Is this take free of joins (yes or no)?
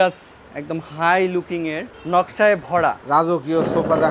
no